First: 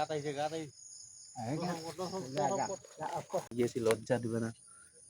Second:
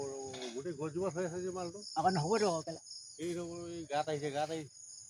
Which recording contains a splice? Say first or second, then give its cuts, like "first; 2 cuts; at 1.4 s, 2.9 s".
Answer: first; 1 cut; at 3.5 s